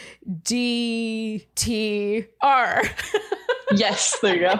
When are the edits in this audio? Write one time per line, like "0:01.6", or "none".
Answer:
0:01.5

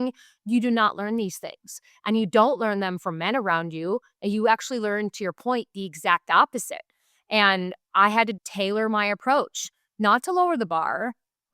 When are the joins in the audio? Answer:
0:08.3

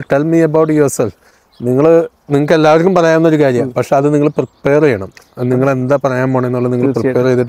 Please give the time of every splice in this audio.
none

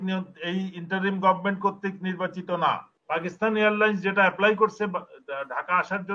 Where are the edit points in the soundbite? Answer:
0:02.9

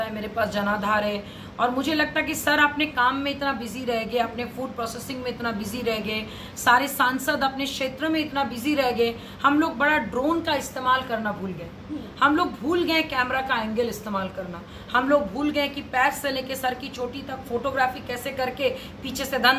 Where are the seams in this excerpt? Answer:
none

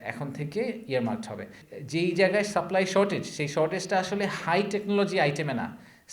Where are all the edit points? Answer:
0:01.4

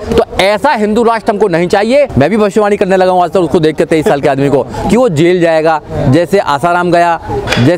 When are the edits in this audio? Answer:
0:02.1

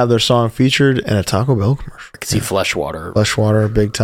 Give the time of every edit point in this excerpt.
0:02.2

